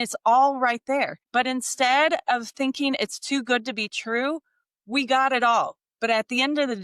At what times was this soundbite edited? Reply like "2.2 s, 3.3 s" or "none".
1.2 s